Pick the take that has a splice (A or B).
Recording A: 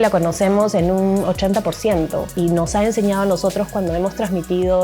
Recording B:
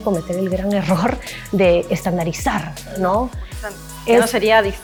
A